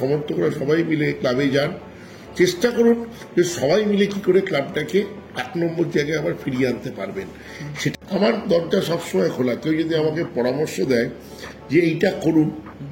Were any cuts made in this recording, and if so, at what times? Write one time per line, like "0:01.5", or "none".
0:07.9